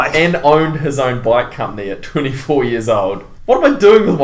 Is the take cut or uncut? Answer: cut